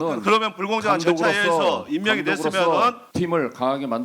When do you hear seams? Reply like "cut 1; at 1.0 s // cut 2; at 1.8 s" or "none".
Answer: cut 1; at 3.0 s